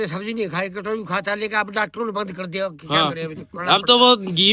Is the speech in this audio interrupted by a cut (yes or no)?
no